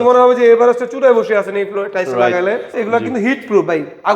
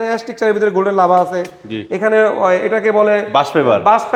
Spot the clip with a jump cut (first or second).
first